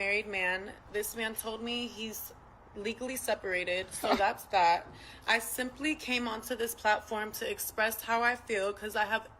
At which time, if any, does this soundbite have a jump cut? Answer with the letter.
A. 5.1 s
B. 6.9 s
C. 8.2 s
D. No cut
A